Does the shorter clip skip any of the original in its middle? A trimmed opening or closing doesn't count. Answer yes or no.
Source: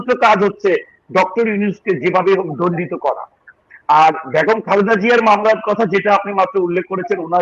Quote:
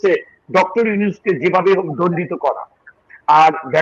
no